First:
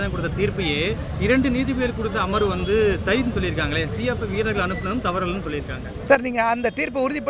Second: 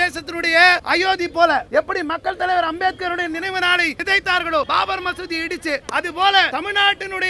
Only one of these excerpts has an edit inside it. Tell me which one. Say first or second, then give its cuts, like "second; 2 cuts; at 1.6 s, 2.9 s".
second; 6 cuts; at 0.8 s, 1.7 s, 4.0 s, 4.7 s, 5.9 s, 6.5 s